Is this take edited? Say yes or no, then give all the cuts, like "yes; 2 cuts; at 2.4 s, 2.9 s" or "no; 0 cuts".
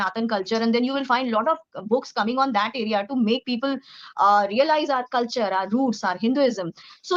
no; 0 cuts